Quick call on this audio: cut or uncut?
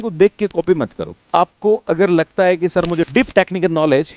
cut